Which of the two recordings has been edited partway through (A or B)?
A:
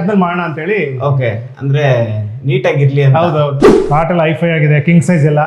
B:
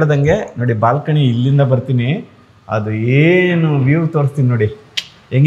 A